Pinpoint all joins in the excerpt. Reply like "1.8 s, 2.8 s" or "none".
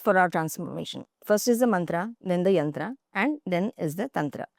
none